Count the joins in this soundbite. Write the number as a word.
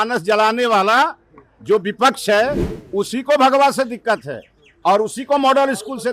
zero